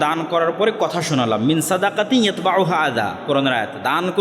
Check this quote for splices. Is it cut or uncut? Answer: uncut